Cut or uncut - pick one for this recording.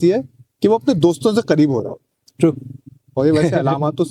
uncut